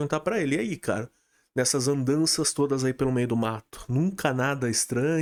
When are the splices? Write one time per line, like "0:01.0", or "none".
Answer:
none